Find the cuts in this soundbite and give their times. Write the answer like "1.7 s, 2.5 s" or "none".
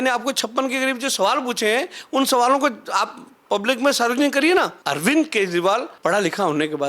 4.8 s, 5.9 s